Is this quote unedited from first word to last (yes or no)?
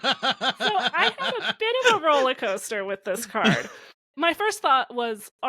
no